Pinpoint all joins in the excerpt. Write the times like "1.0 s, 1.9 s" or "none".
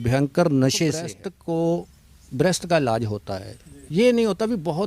1.2 s